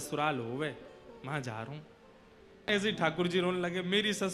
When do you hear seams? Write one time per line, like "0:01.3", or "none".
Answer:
0:02.7